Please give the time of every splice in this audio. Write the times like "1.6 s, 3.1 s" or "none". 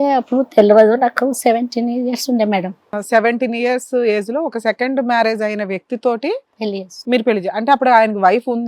3.0 s

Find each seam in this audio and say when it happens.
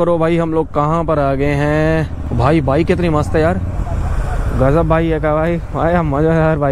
none

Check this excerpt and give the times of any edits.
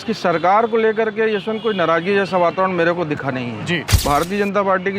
4.0 s

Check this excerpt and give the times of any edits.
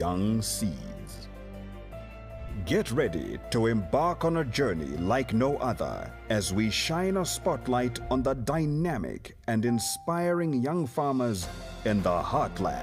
none

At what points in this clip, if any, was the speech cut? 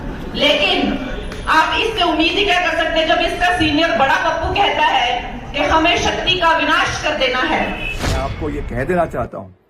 8.3 s

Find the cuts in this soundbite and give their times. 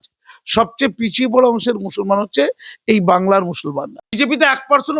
4.0 s

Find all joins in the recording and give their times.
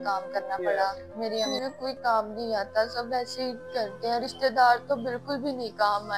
1.5 s

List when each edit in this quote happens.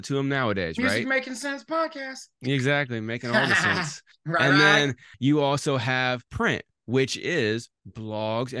5.1 s, 6.3 s

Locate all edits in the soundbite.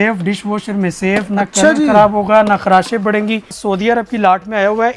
3.6 s

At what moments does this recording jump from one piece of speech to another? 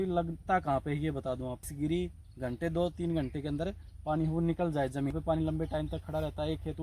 1.7 s, 5.1 s

